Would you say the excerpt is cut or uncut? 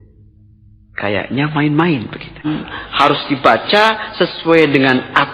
cut